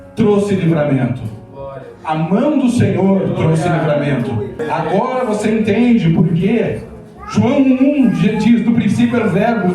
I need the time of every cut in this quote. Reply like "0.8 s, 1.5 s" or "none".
4.6 s